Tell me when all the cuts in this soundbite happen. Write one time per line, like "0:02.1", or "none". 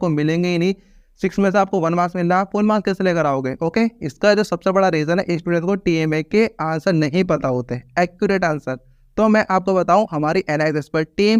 none

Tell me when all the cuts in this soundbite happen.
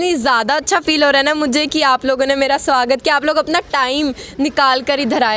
none

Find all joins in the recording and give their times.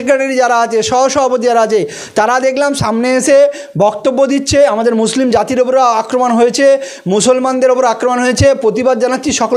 none

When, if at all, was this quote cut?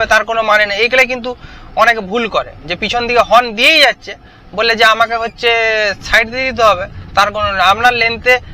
none

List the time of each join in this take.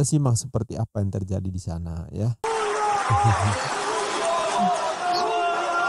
0:02.4

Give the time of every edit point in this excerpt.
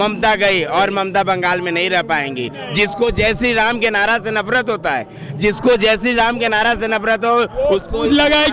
none

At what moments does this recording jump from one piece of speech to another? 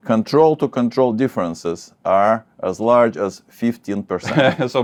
none

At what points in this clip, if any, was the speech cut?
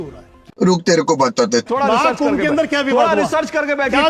0:01.7

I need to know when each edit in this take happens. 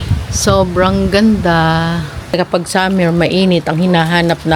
0:02.4

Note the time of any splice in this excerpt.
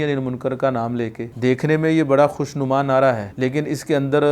0:01.2
0:03.3

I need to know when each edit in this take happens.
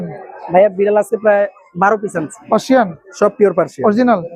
none

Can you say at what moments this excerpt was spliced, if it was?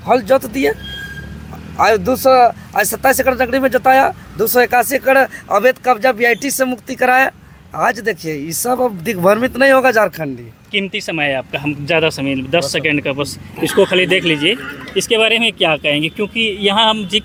none

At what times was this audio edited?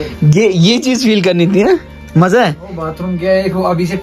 none

